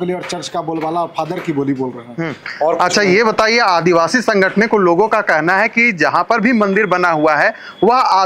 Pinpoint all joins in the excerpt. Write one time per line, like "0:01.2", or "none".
none